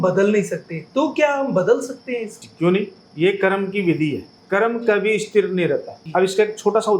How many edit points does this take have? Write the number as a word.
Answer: four